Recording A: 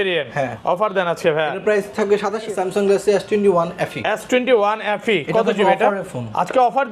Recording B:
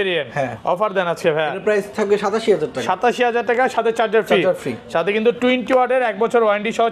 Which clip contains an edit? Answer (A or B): A